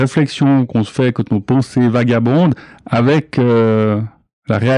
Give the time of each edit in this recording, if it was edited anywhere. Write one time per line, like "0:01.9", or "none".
none